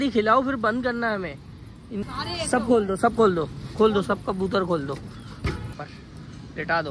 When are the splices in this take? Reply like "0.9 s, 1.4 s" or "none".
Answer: 5.9 s